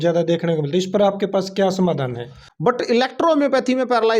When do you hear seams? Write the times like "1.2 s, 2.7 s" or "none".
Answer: 2.7 s